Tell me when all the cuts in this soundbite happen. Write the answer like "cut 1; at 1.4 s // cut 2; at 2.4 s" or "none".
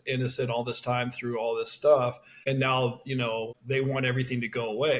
cut 1; at 2.3 s // cut 2; at 3.6 s

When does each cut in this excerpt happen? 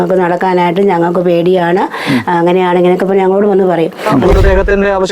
cut 1; at 4.2 s

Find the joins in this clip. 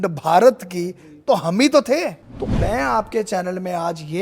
cut 1; at 2.2 s

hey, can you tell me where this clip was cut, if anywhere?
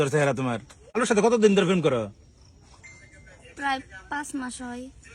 cut 1; at 1.0 s

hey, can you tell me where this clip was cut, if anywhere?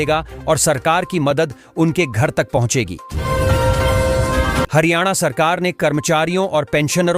cut 1; at 3.0 s // cut 2; at 4.7 s

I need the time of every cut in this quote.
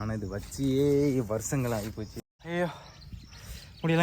cut 1; at 2.3 s

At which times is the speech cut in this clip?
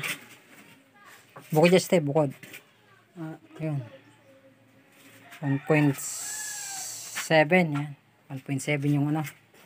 cut 1; at 3.4 s

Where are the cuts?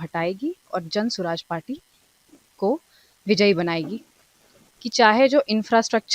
cut 1; at 4.5 s

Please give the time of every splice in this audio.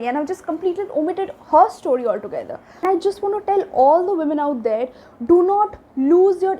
cut 1; at 2.8 s

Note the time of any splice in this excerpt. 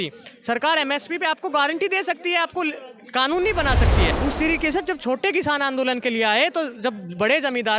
cut 1; at 4.1 s

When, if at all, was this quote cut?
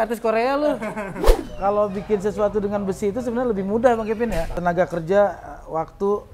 cut 1; at 1.2 s // cut 2; at 4.5 s

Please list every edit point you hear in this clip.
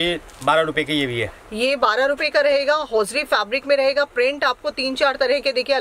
none

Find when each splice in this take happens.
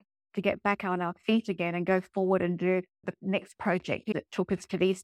cut 1; at 3.0 s // cut 2; at 4.1 s

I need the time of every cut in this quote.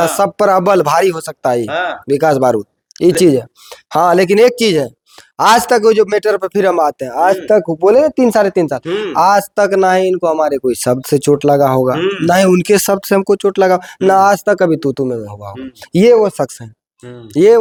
none

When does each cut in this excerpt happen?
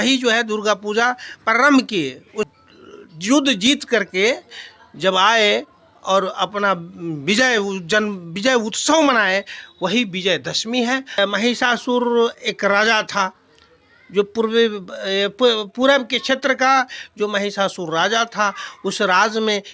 cut 1; at 2.5 s // cut 2; at 11.2 s

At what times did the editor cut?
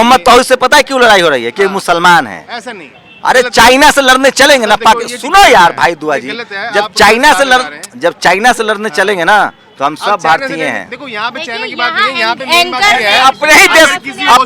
none

